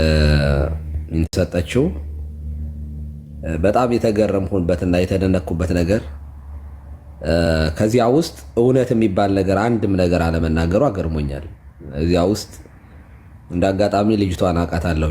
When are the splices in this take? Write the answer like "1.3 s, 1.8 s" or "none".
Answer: 1.3 s

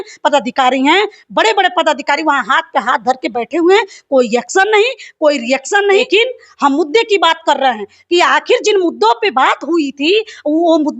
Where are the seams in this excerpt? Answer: 6.0 s

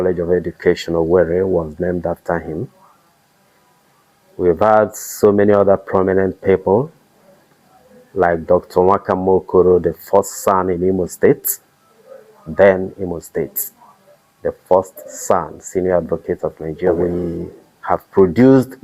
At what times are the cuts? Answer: 16.9 s

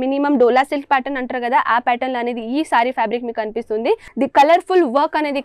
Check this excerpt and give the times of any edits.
4.1 s

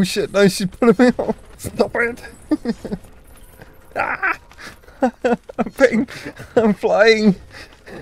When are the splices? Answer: 1.6 s

